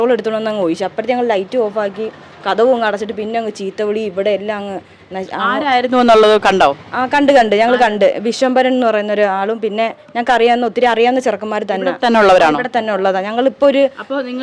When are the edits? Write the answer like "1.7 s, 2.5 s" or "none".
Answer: none